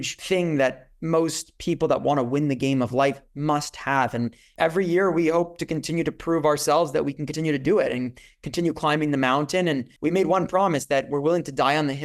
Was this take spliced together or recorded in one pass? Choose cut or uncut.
cut